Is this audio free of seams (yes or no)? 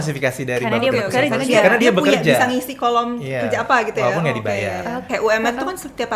no